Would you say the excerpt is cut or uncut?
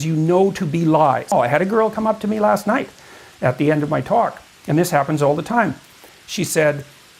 cut